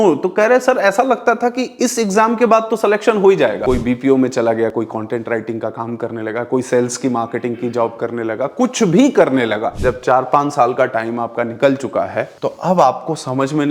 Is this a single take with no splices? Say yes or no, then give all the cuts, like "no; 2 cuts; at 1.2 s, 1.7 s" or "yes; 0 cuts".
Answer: no; 2 cuts; at 3.6 s, 9.7 s